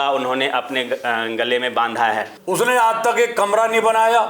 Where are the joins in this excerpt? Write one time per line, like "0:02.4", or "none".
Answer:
0:02.3